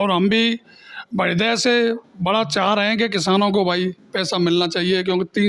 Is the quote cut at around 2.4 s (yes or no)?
no